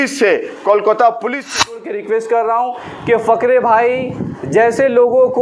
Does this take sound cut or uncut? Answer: cut